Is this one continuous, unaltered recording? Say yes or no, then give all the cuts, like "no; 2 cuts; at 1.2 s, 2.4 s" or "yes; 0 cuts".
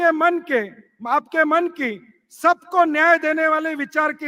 yes; 0 cuts